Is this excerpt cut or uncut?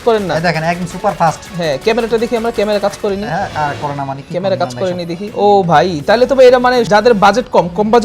cut